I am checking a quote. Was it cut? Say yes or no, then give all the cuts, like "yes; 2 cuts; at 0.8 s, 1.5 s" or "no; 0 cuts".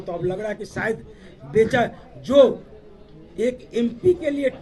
no; 0 cuts